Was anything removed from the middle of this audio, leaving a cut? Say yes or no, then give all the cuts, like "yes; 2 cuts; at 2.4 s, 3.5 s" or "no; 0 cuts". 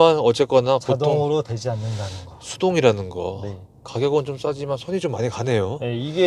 no; 0 cuts